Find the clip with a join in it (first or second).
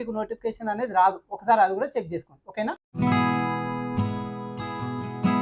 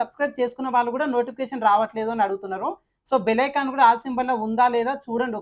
first